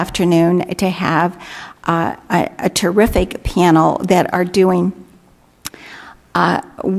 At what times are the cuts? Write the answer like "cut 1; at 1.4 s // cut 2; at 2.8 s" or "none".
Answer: cut 1; at 5.9 s